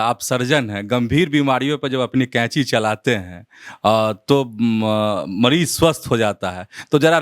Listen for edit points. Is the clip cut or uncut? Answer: uncut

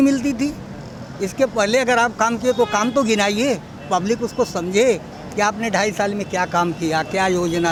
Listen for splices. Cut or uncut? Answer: uncut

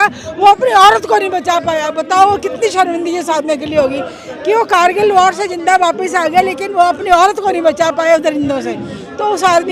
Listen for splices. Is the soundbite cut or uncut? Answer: uncut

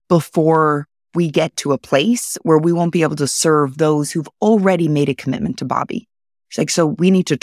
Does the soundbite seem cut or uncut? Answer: uncut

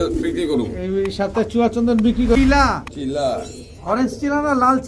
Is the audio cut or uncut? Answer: cut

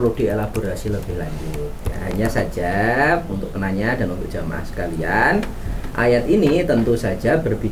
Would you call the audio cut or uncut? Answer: uncut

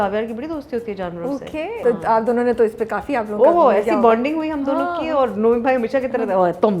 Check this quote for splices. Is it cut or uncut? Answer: cut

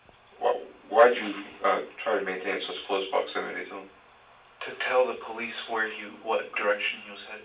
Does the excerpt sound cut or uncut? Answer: uncut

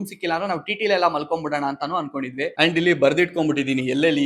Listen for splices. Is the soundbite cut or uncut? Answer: cut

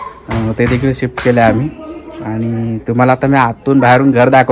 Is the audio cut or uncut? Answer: uncut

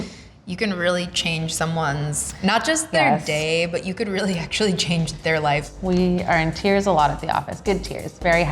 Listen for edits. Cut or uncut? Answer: cut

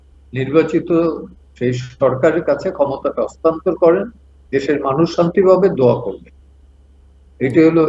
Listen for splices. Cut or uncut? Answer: uncut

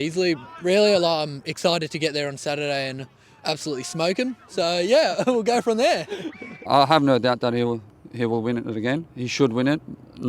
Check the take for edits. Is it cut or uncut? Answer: cut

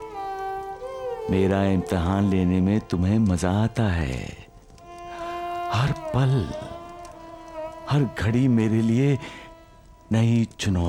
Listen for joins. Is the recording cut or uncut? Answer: uncut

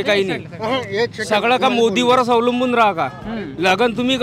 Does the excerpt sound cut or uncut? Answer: uncut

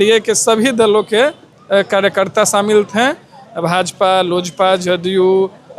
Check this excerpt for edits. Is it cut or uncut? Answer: uncut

